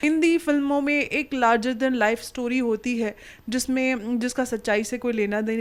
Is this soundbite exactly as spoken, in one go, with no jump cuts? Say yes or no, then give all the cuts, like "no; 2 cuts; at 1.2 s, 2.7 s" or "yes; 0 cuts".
yes; 0 cuts